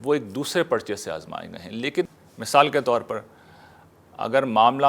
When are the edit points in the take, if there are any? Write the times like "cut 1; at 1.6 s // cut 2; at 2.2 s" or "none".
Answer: cut 1; at 2.1 s